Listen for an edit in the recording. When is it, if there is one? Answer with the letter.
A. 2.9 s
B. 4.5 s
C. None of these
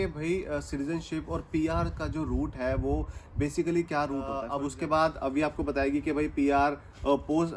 B